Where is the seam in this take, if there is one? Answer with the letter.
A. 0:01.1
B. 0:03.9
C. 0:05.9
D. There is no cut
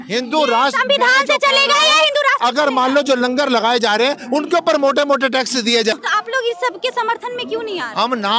C